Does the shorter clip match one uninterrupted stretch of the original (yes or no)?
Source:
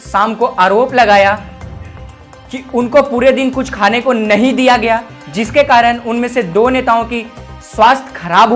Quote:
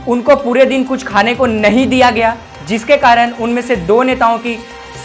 yes